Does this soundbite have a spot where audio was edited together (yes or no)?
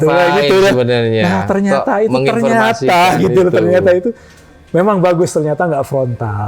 no